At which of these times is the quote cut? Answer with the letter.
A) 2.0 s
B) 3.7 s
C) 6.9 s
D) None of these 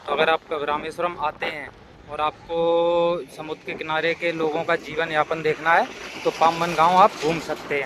D